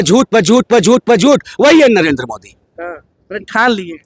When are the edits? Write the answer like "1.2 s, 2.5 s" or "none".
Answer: none